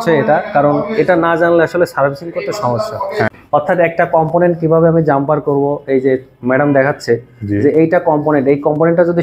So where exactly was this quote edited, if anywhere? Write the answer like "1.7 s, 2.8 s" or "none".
3.3 s